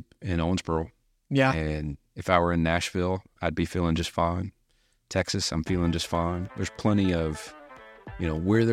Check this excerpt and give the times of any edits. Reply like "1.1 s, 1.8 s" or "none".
none